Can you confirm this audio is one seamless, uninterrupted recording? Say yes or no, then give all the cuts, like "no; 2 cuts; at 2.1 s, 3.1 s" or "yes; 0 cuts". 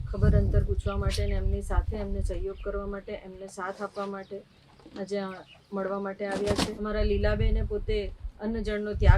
no; 1 cut; at 6.8 s